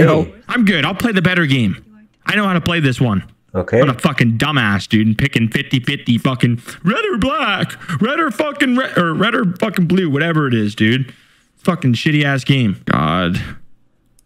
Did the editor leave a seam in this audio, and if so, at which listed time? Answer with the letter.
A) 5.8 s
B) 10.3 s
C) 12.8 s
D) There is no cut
C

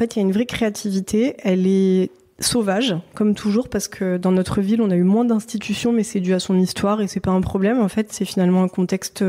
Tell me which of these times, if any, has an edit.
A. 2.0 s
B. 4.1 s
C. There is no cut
C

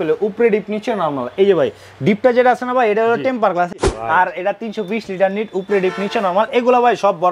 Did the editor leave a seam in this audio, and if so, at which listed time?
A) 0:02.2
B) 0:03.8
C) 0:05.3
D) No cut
B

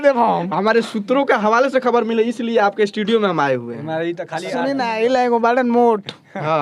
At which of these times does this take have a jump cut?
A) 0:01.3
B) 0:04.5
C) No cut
B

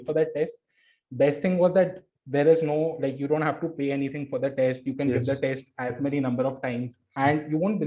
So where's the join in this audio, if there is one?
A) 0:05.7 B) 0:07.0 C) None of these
B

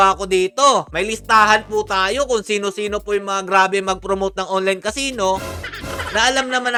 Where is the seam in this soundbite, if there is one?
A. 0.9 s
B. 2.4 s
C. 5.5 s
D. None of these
D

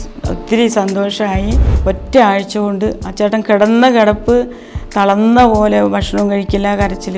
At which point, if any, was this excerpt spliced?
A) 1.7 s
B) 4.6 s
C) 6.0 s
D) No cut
A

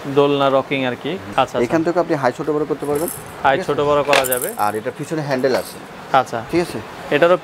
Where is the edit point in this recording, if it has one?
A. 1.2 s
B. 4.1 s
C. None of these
A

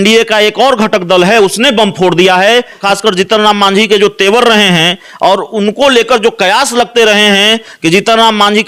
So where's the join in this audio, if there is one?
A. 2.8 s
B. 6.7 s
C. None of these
A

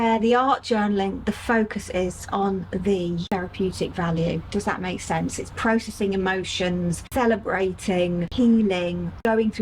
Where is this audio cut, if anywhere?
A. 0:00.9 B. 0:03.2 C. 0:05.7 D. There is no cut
B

